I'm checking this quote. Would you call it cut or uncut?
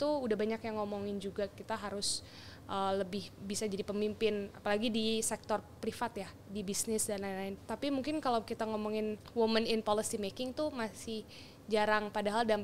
cut